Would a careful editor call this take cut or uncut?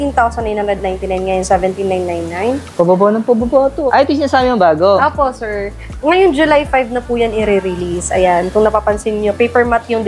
cut